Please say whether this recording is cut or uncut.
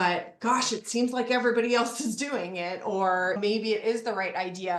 uncut